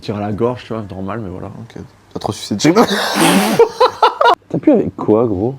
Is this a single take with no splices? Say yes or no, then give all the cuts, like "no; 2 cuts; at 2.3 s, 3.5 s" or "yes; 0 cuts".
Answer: no; 1 cut; at 4.4 s